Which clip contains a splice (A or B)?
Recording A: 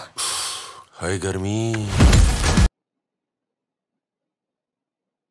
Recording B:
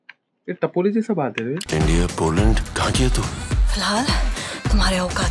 B